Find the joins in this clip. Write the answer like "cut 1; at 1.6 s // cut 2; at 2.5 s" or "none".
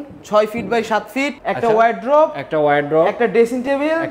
cut 1; at 1.3 s